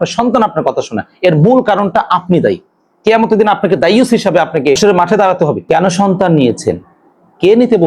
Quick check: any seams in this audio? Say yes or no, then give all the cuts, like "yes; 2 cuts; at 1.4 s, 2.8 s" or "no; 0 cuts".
yes; 2 cuts; at 4.8 s, 5.6 s